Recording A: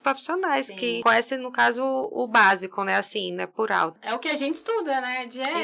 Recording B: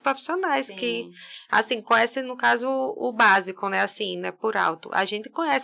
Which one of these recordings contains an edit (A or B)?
A